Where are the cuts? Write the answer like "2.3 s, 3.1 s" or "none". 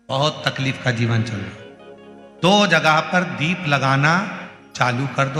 none